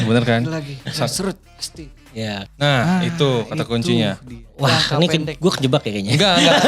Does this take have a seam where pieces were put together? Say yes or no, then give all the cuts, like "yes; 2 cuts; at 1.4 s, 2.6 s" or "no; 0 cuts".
yes; 1 cut; at 2.4 s